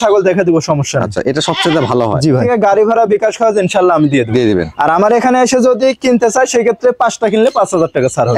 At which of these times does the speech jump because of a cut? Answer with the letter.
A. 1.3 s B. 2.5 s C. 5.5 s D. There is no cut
B